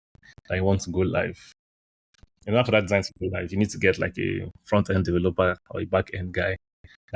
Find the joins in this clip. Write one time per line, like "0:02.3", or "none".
none